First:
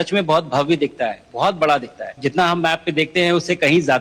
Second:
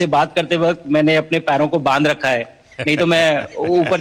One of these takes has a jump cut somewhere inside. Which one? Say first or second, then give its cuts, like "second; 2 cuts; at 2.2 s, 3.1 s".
first; 1 cut; at 2.1 s